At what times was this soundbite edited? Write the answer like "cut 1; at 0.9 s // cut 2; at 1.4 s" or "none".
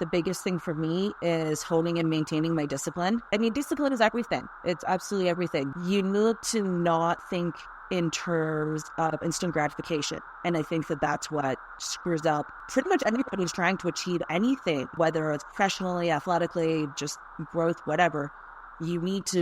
cut 1; at 3.3 s // cut 2; at 5.7 s // cut 3; at 12.6 s // cut 4; at 14.9 s